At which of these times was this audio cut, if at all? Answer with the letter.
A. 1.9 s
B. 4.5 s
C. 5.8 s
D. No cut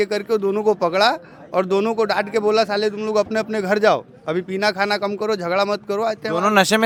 D